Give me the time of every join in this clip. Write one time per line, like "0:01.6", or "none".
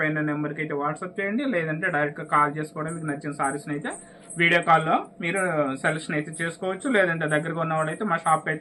none